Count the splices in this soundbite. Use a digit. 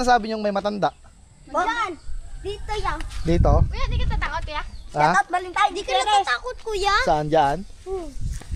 0